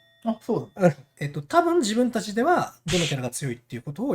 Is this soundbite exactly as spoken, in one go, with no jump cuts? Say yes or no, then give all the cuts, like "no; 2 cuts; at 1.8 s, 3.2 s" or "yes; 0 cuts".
no; 1 cut; at 1.1 s